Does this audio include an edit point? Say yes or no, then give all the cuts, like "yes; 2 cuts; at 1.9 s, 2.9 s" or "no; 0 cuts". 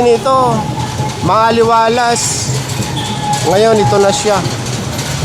no; 0 cuts